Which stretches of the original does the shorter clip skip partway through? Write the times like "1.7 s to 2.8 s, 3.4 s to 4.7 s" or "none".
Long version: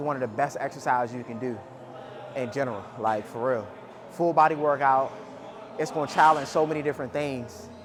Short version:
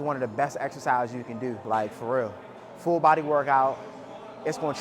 1.6 s to 2.9 s